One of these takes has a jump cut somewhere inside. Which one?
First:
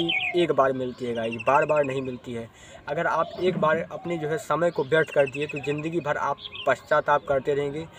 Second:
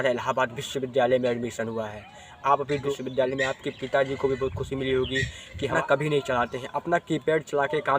second; 2 cuts; at 2.9 s, 5.7 s

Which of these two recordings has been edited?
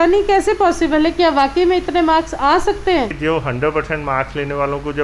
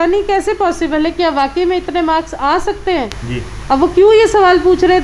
first; 1 cut; at 3.2 s

